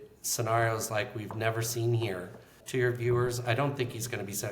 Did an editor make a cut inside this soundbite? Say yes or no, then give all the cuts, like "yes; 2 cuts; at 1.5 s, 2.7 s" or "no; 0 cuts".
yes; 1 cut; at 2.5 s